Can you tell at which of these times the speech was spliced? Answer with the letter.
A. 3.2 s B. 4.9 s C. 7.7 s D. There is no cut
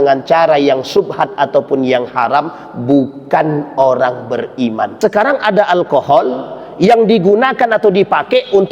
B